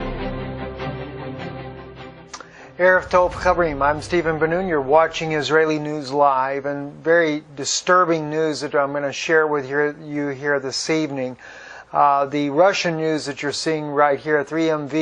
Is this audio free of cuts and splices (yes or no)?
yes